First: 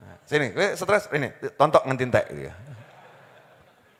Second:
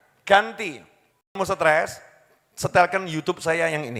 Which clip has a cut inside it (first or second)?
second